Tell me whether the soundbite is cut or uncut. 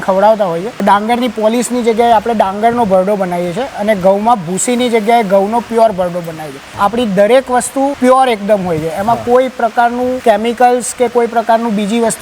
cut